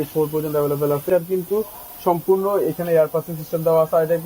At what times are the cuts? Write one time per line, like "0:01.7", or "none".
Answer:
0:01.1